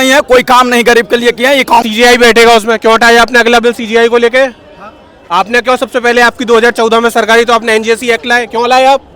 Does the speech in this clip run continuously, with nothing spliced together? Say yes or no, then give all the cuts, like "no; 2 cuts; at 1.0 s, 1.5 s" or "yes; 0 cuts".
no; 1 cut; at 1.8 s